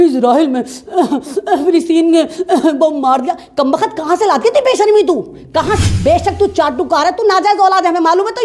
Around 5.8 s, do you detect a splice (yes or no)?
yes